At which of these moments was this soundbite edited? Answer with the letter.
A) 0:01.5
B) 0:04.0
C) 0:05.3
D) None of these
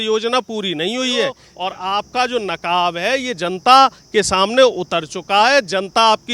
A